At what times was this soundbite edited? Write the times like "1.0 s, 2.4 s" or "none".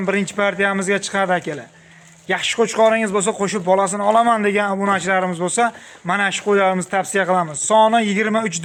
none